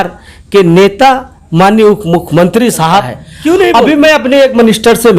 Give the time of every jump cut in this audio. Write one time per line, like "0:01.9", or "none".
0:03.7